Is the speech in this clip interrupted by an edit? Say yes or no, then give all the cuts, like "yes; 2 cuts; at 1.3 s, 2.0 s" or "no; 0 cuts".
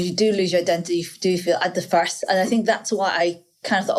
no; 0 cuts